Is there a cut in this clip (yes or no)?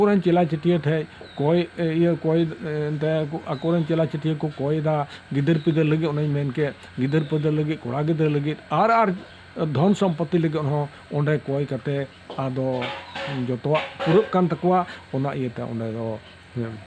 no